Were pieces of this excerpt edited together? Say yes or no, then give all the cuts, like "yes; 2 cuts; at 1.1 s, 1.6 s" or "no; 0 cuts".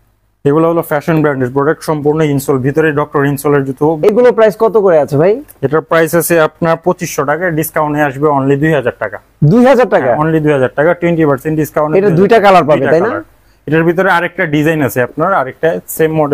no; 0 cuts